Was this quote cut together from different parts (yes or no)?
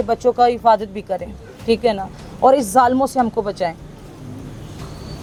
no